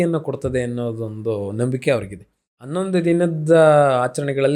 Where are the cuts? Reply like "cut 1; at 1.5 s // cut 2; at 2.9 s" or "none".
cut 1; at 2.7 s